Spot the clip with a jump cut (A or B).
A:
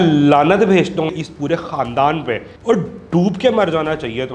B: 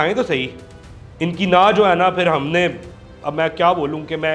A